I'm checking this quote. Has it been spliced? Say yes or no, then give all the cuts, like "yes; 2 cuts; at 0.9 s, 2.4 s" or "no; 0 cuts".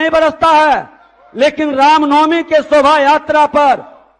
no; 0 cuts